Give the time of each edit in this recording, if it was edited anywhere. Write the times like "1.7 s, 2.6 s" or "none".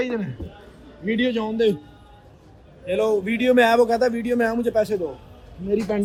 none